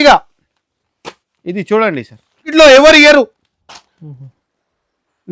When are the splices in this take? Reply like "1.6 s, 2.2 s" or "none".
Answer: 2.5 s